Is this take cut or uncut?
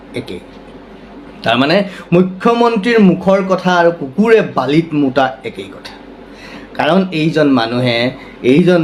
uncut